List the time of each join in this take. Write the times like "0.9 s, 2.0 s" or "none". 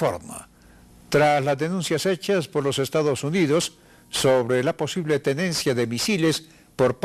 2.8 s